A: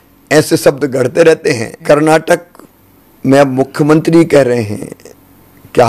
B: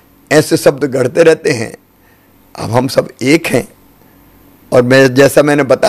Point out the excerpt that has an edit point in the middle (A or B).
A